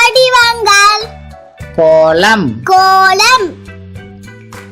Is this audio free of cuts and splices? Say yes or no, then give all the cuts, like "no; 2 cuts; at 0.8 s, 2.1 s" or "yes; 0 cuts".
no; 1 cut; at 3.5 s